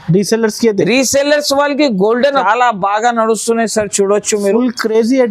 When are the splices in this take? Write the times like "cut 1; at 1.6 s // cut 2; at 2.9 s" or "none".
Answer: cut 1; at 2.4 s